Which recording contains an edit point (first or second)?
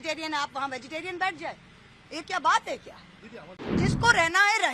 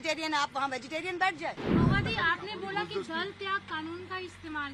second